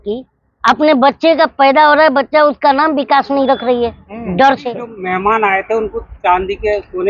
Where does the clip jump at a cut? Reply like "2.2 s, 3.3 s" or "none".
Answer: 4.9 s